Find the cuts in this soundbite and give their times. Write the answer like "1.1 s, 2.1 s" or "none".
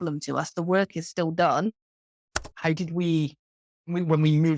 2.3 s